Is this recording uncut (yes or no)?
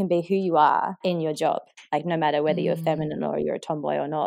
no